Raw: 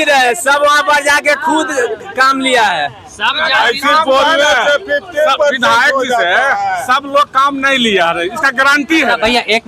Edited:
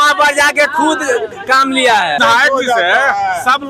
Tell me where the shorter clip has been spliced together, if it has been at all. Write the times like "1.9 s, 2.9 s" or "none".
2.2 s